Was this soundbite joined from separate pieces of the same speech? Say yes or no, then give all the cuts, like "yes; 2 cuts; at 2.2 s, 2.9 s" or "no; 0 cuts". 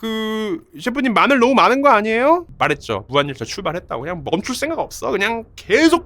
yes; 1 cut; at 2.5 s